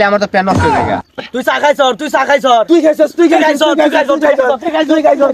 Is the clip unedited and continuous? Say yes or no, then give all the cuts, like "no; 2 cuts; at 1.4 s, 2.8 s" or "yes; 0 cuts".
no; 1 cut; at 0.9 s